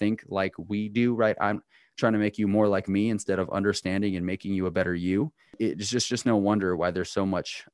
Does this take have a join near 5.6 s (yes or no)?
yes